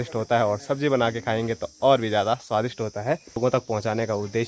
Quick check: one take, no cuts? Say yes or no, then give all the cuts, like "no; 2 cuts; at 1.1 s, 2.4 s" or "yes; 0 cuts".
no; 1 cut; at 3.4 s